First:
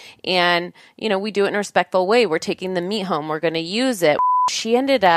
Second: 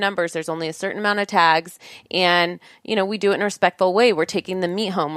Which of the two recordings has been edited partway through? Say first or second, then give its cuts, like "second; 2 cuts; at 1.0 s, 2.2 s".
first; 1 cut; at 4.2 s